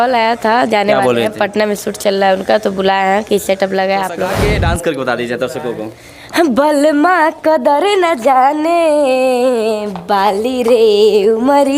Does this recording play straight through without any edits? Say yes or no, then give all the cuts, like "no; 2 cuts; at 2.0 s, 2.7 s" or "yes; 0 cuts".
no; 1 cut; at 4.3 s